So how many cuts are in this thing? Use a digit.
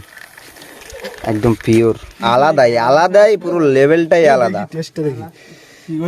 1